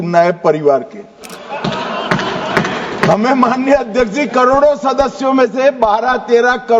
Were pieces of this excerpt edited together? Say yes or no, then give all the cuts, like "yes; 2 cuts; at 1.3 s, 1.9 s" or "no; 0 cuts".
no; 0 cuts